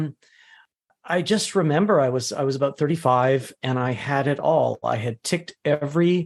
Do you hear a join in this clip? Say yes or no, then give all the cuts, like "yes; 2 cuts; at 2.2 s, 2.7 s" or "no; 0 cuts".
no; 0 cuts